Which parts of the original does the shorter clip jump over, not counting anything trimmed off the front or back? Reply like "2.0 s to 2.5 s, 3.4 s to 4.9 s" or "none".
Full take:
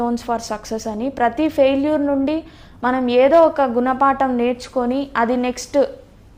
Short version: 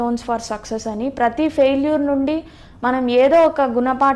none